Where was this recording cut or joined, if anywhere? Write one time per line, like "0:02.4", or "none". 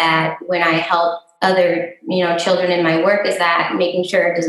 none